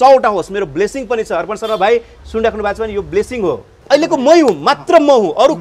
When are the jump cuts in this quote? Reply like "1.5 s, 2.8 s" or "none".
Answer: 3.8 s